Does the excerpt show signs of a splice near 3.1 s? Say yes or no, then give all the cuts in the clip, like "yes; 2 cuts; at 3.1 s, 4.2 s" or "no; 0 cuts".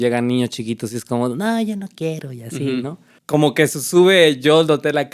yes; 1 cut; at 3.1 s